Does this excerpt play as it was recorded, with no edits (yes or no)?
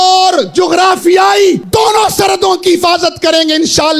no